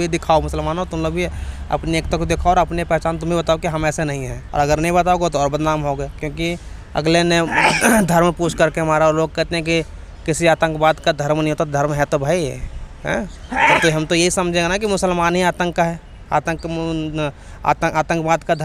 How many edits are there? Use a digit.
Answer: 0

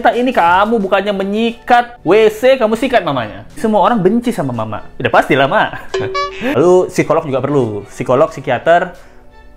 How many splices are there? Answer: 2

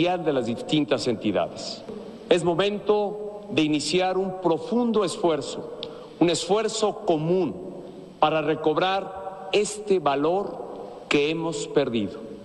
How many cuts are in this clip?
1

